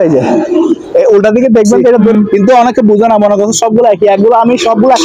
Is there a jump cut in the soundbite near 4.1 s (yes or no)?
no